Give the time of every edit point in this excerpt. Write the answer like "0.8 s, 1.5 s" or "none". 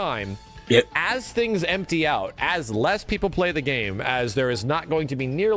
none